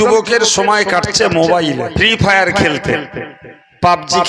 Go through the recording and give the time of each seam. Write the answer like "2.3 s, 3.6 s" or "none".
1.9 s